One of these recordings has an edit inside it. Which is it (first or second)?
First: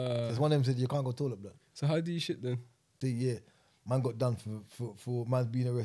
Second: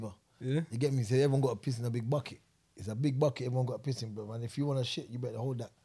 first